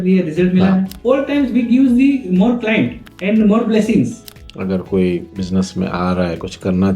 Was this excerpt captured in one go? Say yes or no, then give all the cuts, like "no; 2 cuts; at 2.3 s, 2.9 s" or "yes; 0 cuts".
no; 4 cuts; at 0.9 s, 3.1 s, 4.3 s, 5.3 s